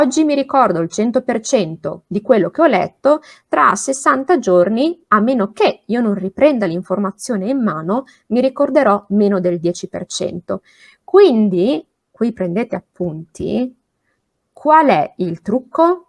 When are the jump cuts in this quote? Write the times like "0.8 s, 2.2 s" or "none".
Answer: none